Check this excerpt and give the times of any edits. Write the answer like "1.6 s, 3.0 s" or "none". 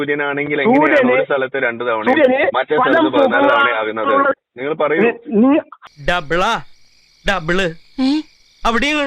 5.8 s